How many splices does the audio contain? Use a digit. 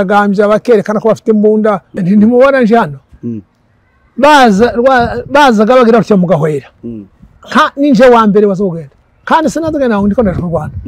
1